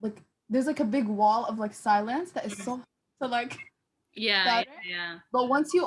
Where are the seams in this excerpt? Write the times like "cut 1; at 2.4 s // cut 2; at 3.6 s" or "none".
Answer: none